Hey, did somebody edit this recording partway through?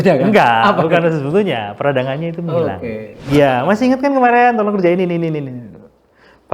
yes; 1 cut; at 3.2 s

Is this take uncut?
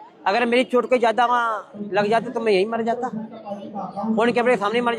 yes; 0 cuts

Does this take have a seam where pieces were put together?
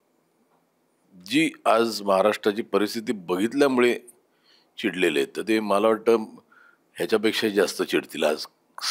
no; 0 cuts

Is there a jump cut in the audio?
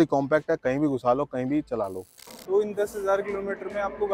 yes; 1 cut; at 2.1 s

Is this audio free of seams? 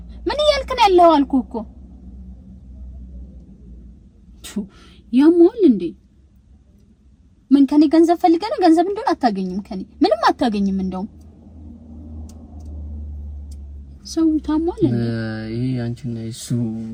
yes; 0 cuts

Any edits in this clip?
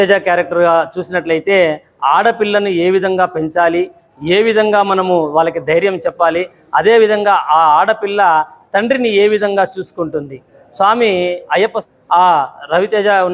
yes; 1 cut; at 11.8 s

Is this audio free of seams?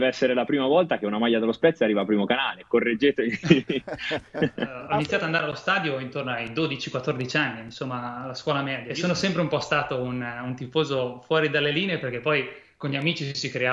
no; 2 cuts; at 4.8 s, 8.9 s

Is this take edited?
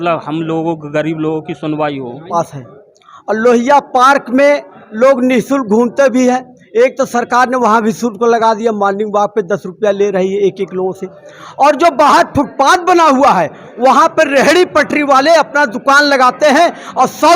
yes; 1 cut; at 2.2 s

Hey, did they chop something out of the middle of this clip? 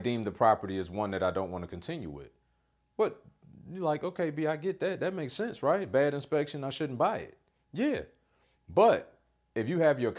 no; 0 cuts

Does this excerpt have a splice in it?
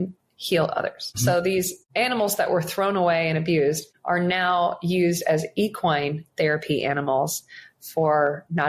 yes; 3 cuts; at 1.1 s, 1.8 s, 3.9 s

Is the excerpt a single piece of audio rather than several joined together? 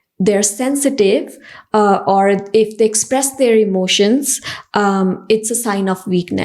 yes; 0 cuts

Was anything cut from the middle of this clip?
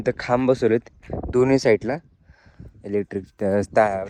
no; 0 cuts

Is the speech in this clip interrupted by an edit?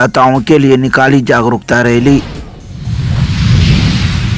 yes; 1 cut; at 2.3 s

